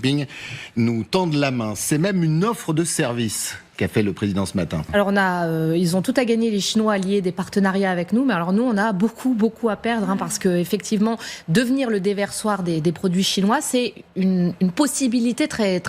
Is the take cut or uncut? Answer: cut